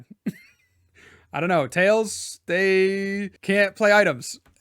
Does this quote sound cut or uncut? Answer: cut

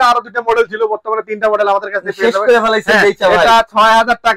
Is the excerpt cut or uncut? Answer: uncut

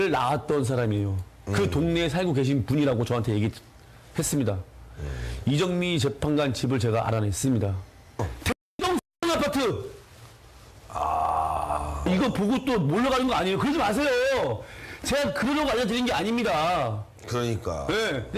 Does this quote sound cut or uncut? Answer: uncut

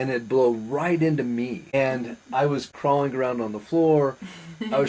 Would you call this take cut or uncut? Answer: cut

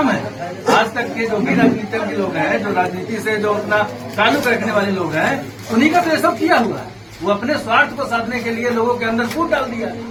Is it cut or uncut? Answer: uncut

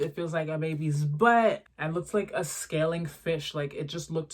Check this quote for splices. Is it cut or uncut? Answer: cut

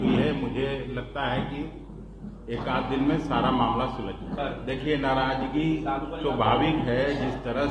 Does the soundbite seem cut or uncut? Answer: cut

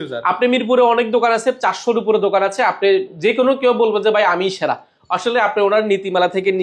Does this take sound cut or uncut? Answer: uncut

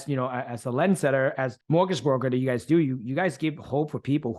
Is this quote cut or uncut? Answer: cut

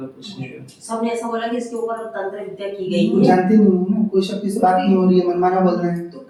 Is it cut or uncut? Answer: uncut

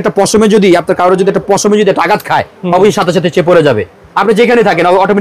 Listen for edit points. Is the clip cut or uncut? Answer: uncut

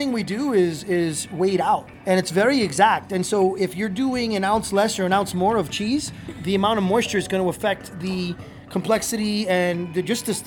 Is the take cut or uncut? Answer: cut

